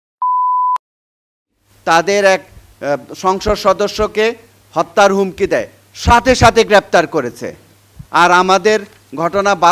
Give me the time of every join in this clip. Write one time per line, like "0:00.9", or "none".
none